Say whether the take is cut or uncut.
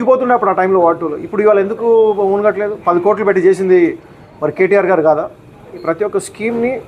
cut